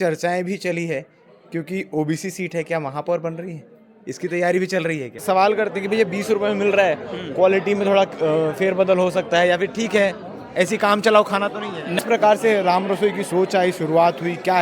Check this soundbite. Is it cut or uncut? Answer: cut